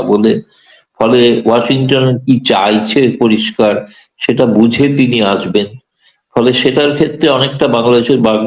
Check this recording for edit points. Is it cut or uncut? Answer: uncut